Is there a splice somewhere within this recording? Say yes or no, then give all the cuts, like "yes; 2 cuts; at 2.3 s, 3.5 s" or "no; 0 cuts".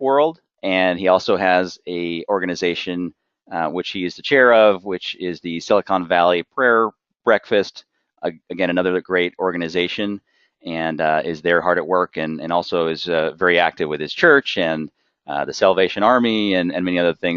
yes; 1 cut; at 6.7 s